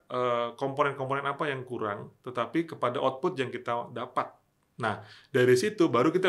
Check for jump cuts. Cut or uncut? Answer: uncut